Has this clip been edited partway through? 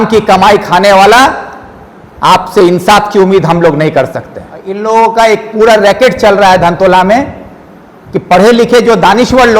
yes; 1 cut; at 4.7 s

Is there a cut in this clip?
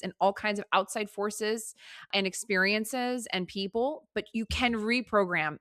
yes; 1 cut; at 2.1 s

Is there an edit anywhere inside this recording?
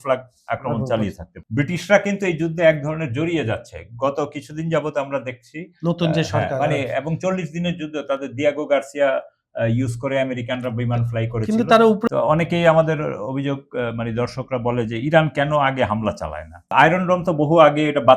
yes; 3 cuts; at 1.3 s, 12.1 s, 16.7 s

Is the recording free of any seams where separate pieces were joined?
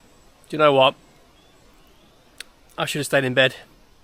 yes; 0 cuts

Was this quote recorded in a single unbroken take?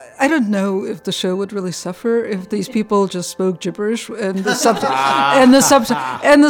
no; 1 cut; at 1.0 s

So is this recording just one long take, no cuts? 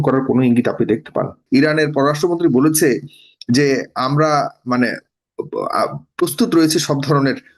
no; 1 cut; at 1.4 s

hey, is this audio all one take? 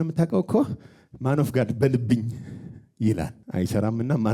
no; 1 cut; at 3.4 s

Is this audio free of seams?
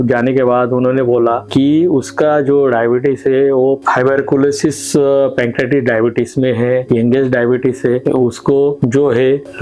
yes; 0 cuts

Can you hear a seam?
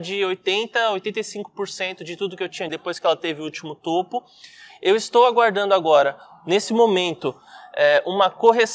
yes; 1 cut; at 2.7 s

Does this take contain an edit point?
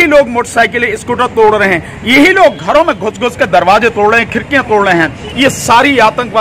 yes; 1 cut; at 5.2 s

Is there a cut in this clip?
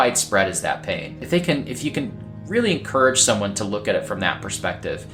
no; 0 cuts

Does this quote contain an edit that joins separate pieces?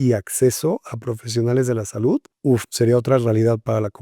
yes; 1 cut; at 2.3 s

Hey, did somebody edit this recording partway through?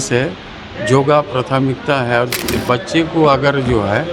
yes; 1 cut; at 2.3 s

